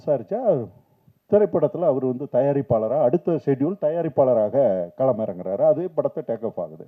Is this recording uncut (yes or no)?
yes